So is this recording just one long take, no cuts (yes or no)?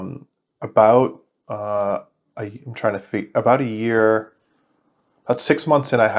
yes